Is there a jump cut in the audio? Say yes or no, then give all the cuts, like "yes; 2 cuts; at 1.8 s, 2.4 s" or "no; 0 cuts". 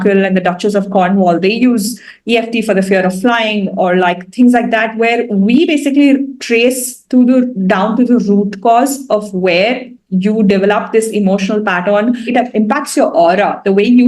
yes; 1 cut; at 12.2 s